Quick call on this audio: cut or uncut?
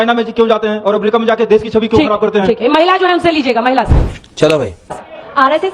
uncut